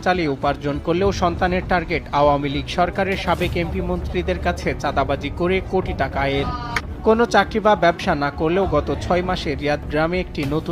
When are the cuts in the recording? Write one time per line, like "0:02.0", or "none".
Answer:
0:06.8